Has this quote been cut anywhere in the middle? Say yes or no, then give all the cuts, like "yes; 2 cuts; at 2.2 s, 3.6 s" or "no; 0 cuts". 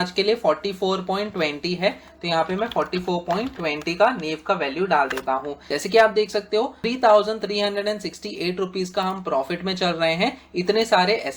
yes; 2 cuts; at 5.6 s, 6.8 s